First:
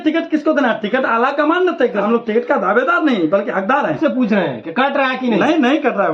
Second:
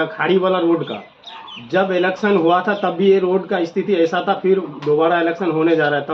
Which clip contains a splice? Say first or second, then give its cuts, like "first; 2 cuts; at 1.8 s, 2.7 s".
first; 2 cuts; at 2.0 s, 4.0 s